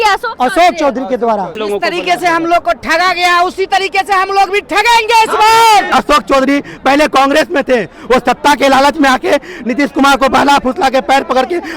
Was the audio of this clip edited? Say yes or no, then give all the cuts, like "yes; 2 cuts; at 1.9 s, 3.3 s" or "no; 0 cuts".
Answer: yes; 2 cuts; at 1.6 s, 5.9 s